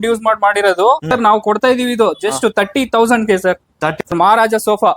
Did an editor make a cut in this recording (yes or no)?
yes